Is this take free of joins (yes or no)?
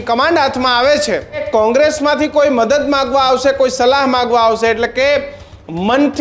no